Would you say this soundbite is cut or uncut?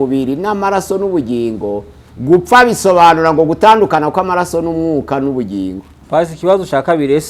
cut